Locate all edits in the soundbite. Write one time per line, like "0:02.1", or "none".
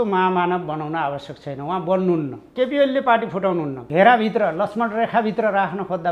0:02.5
0:03.8